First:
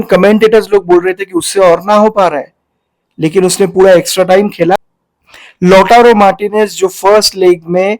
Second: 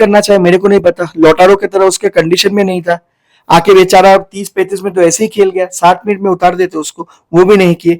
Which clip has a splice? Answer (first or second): first